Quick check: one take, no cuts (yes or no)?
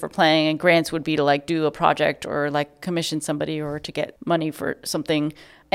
no